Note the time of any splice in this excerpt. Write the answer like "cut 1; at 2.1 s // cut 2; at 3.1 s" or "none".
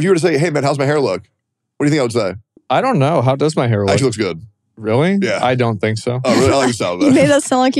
cut 1; at 2.5 s